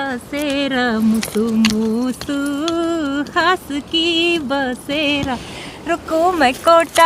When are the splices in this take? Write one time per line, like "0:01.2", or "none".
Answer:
none